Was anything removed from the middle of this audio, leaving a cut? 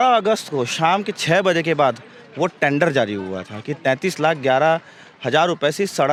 no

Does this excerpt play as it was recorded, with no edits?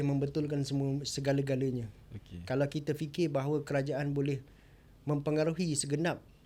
yes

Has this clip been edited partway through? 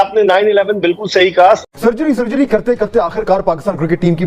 yes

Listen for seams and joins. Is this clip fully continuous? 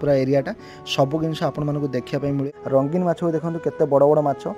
no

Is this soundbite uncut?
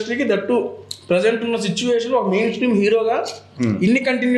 yes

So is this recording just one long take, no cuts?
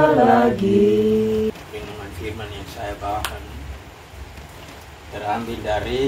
no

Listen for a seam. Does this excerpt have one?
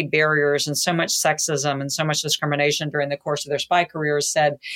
no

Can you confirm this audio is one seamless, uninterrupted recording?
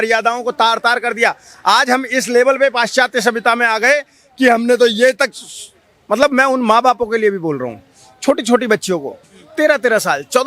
yes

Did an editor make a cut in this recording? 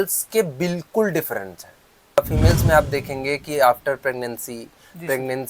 yes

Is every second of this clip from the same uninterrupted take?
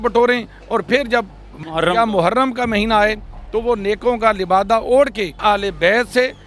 no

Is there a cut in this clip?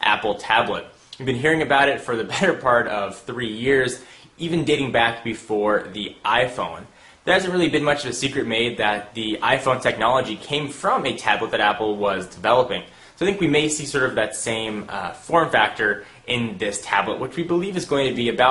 yes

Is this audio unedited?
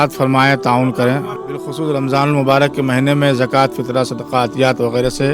yes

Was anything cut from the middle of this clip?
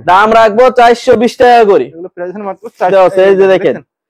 yes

